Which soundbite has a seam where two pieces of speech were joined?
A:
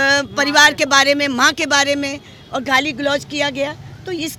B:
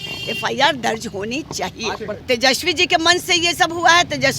B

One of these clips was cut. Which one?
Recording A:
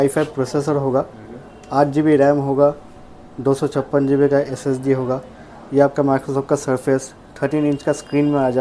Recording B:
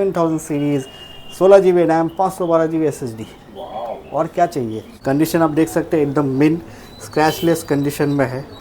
B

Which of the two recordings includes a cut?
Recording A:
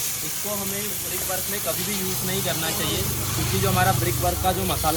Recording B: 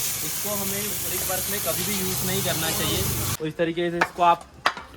B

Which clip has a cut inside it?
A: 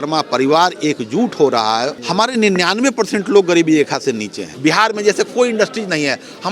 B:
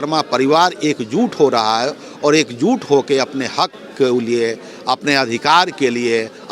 A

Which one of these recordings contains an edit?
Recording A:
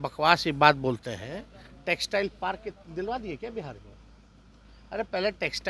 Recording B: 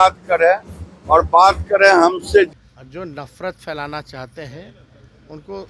B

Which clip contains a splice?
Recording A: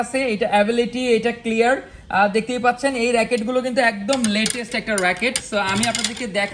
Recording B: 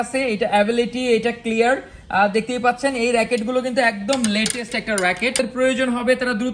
B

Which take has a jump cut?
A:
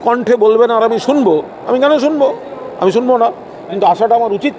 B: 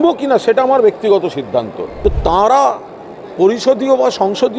B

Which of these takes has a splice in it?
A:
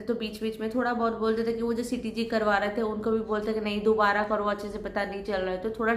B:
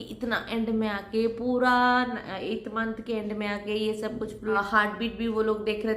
B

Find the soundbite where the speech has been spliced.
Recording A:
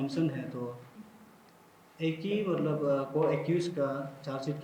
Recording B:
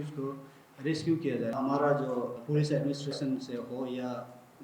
B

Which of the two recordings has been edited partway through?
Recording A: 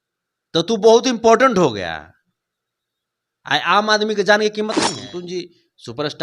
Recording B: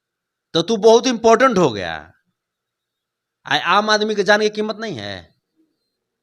A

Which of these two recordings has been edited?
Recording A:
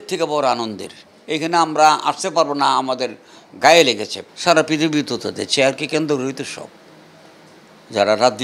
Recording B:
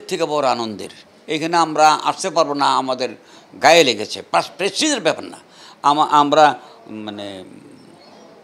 A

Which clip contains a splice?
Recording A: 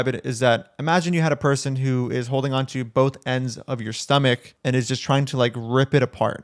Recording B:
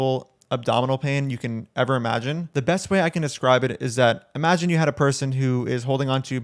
A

